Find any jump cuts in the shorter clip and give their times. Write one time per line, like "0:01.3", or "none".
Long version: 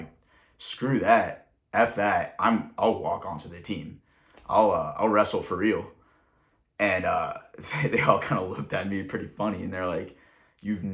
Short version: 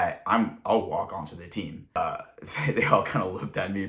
0:02.0